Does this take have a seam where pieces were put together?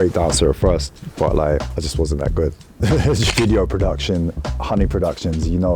yes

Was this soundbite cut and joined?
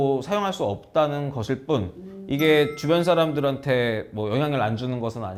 no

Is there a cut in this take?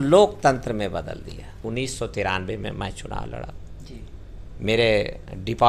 yes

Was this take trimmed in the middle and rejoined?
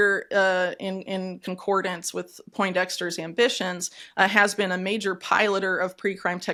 no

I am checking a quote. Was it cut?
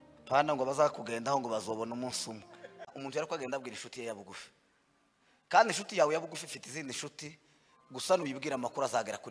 yes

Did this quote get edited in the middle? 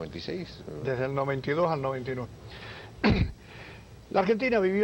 no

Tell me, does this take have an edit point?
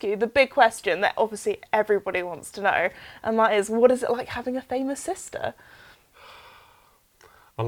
no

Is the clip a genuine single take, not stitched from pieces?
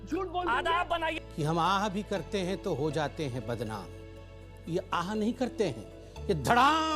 no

